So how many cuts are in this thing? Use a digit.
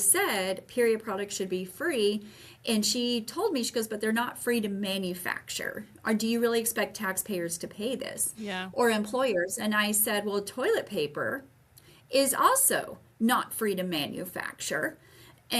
0